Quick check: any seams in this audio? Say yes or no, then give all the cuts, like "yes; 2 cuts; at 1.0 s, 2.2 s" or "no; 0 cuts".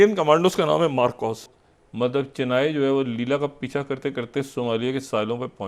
yes; 1 cut; at 1.5 s